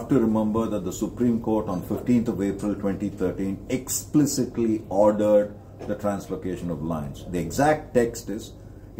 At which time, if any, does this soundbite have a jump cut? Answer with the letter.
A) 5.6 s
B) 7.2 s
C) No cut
C